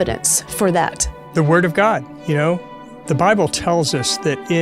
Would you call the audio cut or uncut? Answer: cut